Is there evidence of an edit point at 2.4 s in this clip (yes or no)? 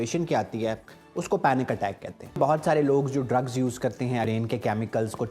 yes